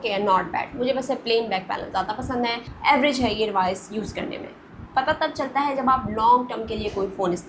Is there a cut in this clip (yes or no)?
yes